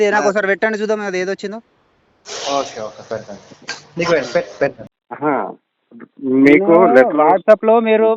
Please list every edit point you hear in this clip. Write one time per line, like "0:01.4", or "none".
0:04.9